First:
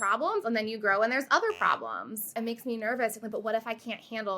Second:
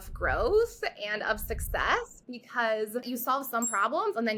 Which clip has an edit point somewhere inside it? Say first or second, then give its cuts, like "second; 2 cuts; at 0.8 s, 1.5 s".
first; 1 cut; at 2.4 s